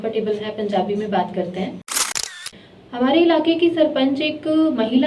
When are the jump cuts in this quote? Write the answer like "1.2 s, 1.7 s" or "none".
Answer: 2.3 s